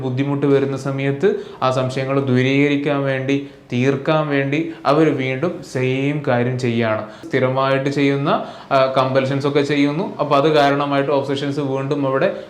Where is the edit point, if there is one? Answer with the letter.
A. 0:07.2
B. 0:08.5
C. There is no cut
A